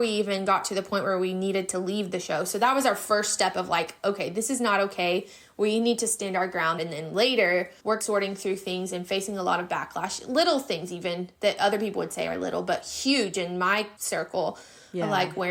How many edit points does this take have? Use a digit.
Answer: 3